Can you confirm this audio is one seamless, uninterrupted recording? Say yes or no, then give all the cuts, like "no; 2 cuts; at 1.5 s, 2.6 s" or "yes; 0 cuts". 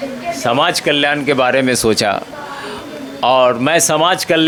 yes; 0 cuts